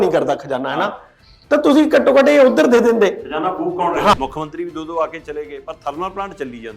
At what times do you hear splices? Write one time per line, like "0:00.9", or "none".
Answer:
0:04.1